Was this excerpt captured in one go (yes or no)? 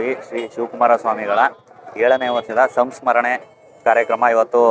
yes